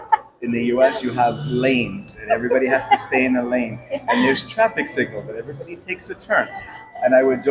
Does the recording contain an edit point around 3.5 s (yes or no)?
no